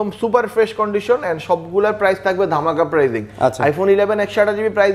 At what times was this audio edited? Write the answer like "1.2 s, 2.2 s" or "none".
none